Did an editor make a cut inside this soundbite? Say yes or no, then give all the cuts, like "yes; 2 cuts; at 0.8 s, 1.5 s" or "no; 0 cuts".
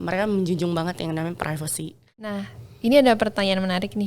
yes; 1 cut; at 2.4 s